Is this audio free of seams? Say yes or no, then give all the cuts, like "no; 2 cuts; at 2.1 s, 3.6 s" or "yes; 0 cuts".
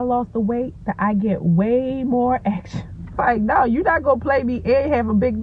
no; 1 cut; at 3.2 s